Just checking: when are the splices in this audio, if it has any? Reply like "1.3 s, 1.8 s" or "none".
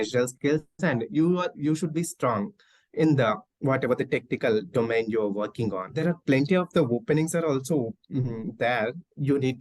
5.9 s